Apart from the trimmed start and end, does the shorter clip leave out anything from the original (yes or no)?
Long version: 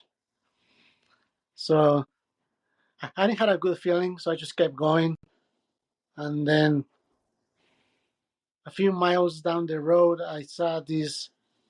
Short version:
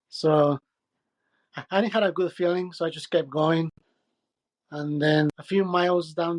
yes